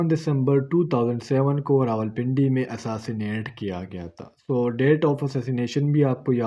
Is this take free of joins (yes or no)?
yes